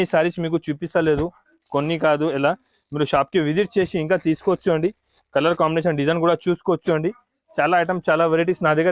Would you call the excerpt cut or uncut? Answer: uncut